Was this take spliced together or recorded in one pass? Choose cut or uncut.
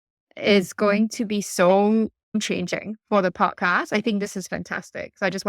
cut